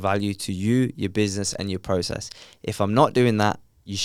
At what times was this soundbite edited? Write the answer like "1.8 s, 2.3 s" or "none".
none